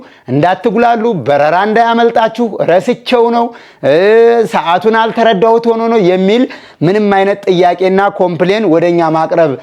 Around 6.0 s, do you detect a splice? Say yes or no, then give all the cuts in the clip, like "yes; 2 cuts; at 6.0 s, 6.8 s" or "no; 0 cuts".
no; 0 cuts